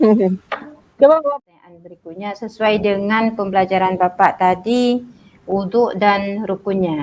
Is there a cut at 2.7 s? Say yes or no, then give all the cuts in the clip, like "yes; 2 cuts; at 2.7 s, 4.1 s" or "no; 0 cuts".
no; 1 cut; at 1.3 s